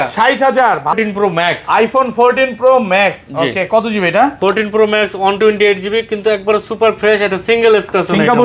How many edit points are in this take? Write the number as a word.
one